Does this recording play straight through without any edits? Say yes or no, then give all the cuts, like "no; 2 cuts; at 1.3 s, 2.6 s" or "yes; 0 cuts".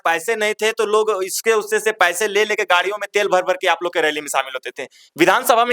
yes; 0 cuts